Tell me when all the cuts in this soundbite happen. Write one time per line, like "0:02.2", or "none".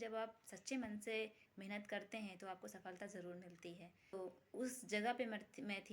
0:04.1